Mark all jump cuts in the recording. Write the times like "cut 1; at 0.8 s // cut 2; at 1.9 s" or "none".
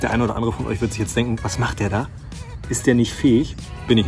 none